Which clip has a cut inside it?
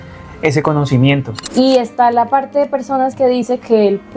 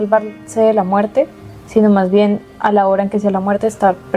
first; 1 cut; at 1.4 s

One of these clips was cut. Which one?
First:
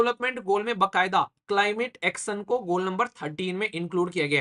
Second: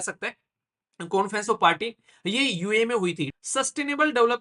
second; 1 cut; at 3.3 s

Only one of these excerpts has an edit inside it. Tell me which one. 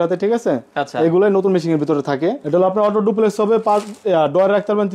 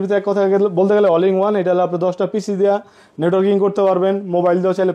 first; 1 cut; at 2.4 s

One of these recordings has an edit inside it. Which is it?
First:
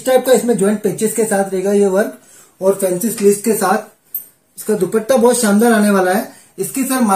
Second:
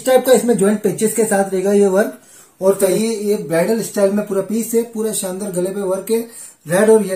second; 1 cut; at 3.0 s

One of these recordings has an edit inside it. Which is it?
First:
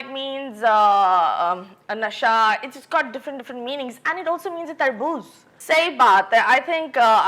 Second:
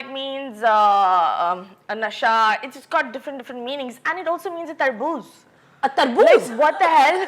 first; 1 cut; at 5.5 s

